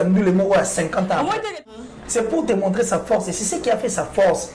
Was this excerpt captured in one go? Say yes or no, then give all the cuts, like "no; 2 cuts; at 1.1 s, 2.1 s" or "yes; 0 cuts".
no; 1 cut; at 1.7 s